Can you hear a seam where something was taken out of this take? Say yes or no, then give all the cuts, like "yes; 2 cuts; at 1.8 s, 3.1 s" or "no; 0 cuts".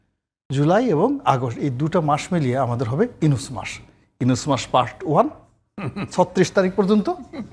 no; 0 cuts